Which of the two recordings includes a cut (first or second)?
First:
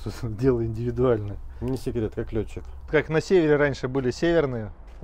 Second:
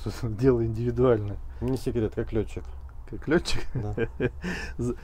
first